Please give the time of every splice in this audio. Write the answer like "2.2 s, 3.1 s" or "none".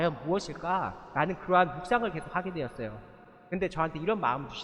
none